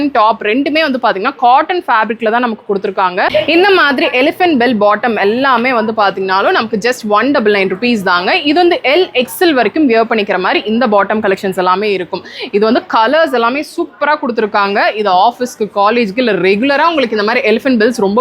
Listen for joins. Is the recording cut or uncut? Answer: cut